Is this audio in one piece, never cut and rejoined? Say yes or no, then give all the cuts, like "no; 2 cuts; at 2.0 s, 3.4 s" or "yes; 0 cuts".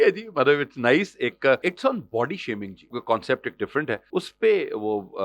no; 3 cuts; at 1.6 s, 3.0 s, 4.0 s